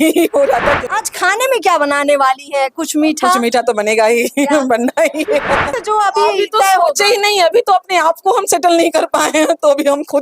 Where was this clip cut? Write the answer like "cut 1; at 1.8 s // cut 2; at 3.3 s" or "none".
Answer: cut 1; at 0.9 s // cut 2; at 5.8 s